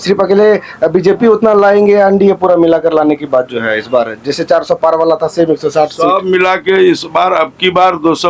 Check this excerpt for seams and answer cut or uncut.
uncut